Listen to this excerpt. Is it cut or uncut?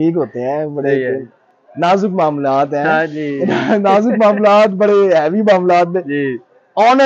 uncut